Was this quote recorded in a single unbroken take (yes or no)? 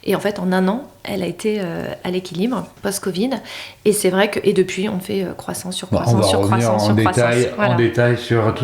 no